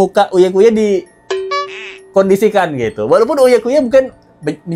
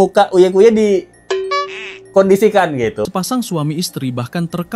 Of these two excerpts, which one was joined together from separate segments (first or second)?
second